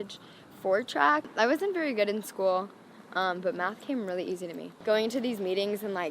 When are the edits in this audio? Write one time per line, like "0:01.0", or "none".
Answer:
0:01.3
0:04.7